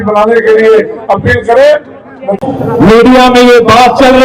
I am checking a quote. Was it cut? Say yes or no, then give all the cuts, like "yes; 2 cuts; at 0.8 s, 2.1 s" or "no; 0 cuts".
yes; 1 cut; at 2.4 s